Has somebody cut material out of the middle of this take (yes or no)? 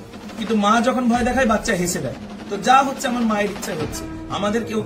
no